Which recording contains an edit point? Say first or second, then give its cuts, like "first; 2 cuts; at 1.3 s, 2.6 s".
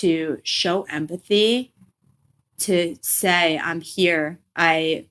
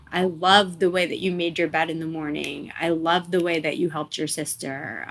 first; 1 cut; at 2.4 s